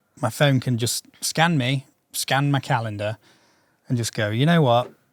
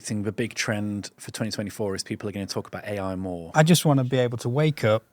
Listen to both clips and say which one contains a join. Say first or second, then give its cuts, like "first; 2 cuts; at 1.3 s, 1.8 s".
second; 2 cuts; at 1.2 s, 3.5 s